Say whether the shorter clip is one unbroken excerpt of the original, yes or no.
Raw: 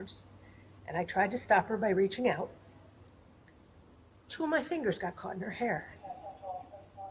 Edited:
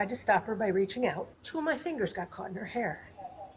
no